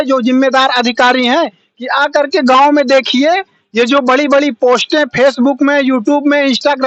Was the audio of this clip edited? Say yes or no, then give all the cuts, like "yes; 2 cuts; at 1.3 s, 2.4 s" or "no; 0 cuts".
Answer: no; 0 cuts